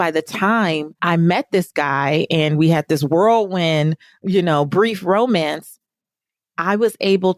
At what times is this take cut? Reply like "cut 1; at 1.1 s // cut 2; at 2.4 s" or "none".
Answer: cut 1; at 0.9 s